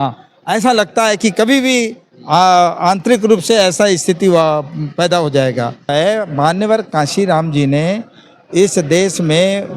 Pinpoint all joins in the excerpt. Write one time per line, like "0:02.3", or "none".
0:05.9